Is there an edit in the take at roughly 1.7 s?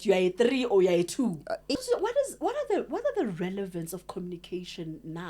yes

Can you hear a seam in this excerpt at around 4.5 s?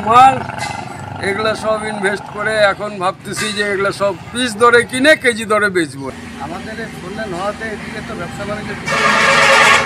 no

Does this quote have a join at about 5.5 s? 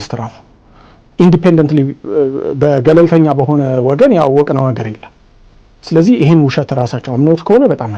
no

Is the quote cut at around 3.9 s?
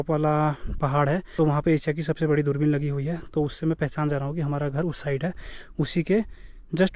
no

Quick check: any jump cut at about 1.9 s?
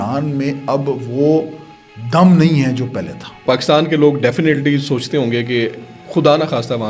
no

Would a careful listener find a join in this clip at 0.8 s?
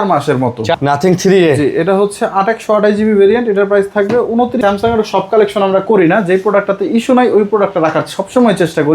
yes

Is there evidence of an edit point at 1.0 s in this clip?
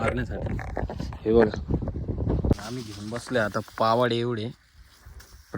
no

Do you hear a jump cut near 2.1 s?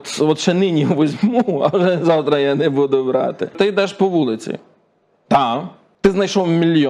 no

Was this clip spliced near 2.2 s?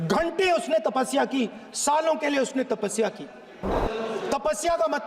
no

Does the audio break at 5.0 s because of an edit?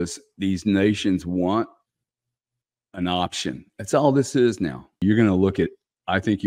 yes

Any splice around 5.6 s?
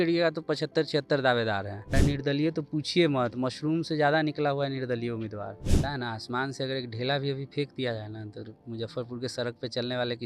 yes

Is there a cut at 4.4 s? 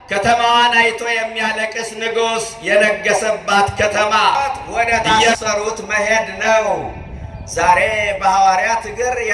yes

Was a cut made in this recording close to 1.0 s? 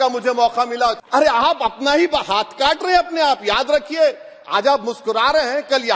yes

